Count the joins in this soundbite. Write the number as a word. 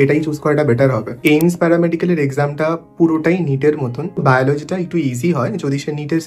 two